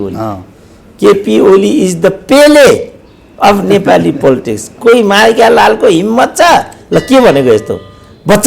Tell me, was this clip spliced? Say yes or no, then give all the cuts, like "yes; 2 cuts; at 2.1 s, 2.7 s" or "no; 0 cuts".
no; 0 cuts